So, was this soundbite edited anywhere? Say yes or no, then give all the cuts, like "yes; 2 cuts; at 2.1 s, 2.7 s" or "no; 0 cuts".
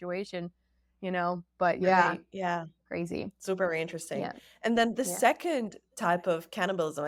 no; 0 cuts